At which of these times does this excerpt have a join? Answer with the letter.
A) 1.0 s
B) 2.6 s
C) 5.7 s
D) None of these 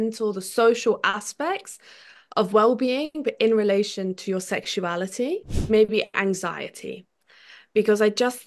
C